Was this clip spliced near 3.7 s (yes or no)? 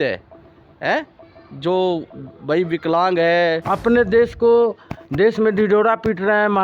yes